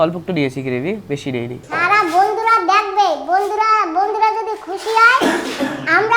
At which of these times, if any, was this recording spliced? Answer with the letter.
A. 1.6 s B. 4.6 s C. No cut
A